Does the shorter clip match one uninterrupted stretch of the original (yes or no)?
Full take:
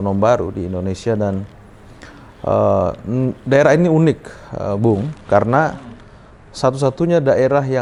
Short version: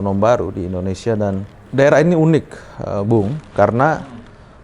no